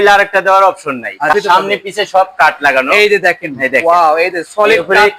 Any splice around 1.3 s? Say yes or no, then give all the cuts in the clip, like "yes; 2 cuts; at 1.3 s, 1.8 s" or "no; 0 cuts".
yes; 1 cut; at 1.3 s